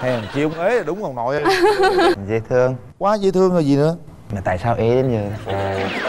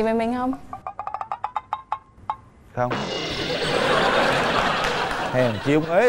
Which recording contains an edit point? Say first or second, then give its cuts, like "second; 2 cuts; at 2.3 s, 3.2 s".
first; 1 cut; at 2.1 s